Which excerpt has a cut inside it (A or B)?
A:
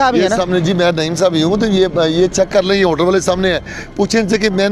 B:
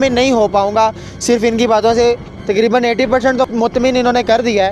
B